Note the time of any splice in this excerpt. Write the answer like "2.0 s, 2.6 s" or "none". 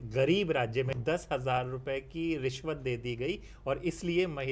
1.0 s